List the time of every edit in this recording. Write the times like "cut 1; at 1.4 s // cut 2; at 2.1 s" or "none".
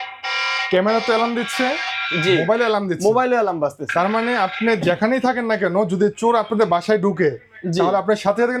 none